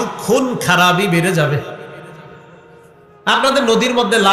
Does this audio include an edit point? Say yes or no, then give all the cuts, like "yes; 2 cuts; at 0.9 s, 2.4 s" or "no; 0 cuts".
no; 0 cuts